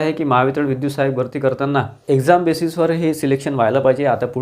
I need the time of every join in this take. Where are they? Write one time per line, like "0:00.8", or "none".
0:02.0